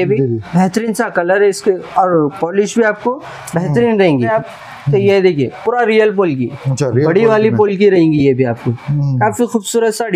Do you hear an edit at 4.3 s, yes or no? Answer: yes